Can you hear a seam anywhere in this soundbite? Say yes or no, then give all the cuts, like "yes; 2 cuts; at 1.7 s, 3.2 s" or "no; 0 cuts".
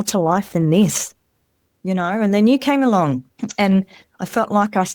yes; 1 cut; at 3.4 s